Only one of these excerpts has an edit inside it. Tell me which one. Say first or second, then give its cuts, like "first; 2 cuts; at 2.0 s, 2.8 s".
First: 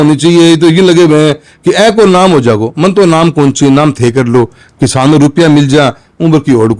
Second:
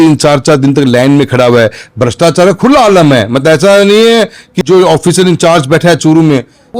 second; 1 cut; at 4.5 s